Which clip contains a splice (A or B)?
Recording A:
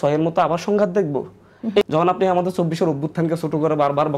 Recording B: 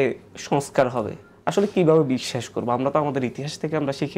A